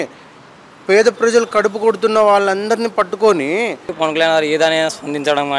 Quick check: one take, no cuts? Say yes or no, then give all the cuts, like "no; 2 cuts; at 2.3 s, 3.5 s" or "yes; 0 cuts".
no; 1 cut; at 3.9 s